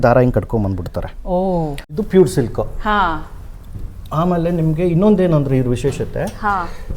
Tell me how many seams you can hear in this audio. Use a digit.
1